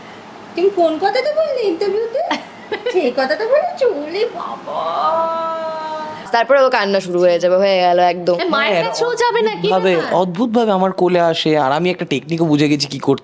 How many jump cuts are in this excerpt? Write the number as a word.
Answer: one